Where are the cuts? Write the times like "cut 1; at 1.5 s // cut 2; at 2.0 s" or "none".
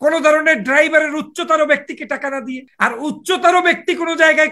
cut 1; at 2.6 s